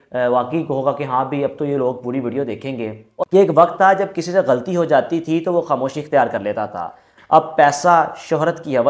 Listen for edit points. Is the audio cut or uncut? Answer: cut